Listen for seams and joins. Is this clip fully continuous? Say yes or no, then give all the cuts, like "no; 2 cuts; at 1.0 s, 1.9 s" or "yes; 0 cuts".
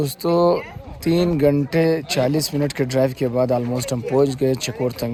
yes; 0 cuts